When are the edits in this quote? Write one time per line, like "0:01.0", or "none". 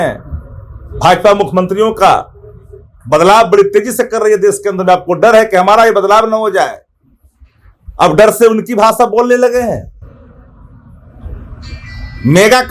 none